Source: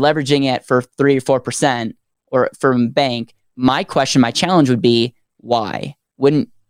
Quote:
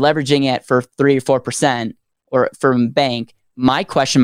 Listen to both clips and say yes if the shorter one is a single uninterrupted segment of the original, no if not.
yes